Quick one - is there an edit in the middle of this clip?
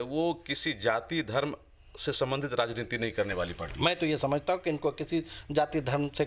no; 0 cuts

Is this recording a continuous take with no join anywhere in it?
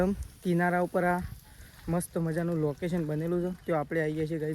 yes; 0 cuts

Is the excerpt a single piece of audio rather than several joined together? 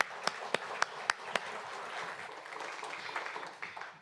yes; 0 cuts

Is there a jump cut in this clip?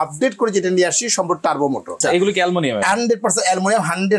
yes; 1 cut; at 2.0 s

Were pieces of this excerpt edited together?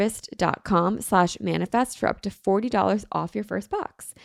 no; 0 cuts

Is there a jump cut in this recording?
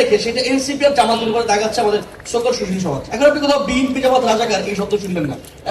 yes; 1 cut; at 3.1 s

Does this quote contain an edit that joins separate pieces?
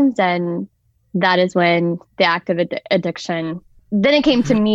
yes; 1 cut; at 3.7 s

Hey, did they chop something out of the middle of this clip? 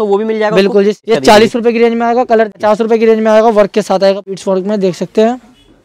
yes; 3 cuts; at 1.0 s, 2.5 s, 4.3 s

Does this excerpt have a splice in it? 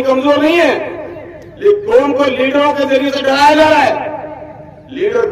no; 0 cuts

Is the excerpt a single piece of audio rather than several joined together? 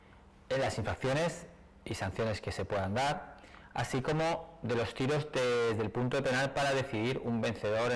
no; 1 cut; at 2.1 s

